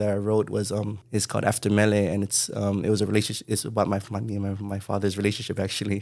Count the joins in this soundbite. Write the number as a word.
one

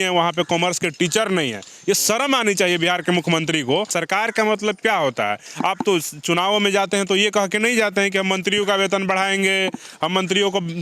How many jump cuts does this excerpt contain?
one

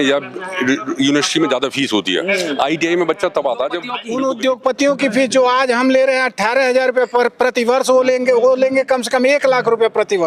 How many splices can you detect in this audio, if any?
one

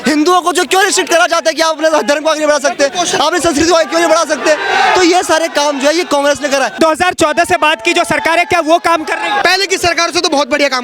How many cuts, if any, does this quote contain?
two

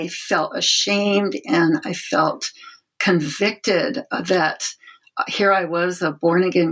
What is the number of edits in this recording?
zero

